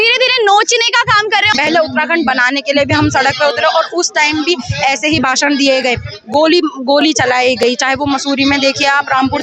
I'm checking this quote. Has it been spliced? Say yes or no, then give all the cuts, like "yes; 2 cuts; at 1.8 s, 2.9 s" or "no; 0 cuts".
yes; 1 cut; at 1.5 s